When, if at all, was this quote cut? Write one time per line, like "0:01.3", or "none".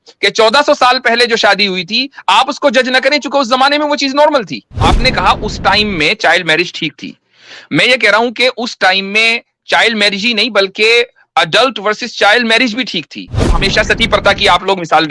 0:04.8
0:13.5